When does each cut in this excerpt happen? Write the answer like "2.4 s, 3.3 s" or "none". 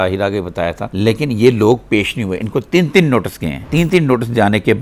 none